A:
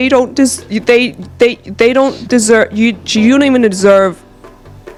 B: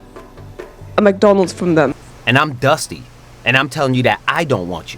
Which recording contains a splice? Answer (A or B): B